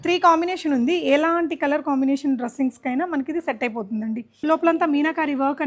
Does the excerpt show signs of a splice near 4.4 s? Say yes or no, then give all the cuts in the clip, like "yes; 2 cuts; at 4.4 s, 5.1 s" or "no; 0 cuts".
yes; 1 cut; at 4.4 s